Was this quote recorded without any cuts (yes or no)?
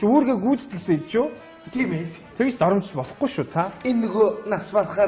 no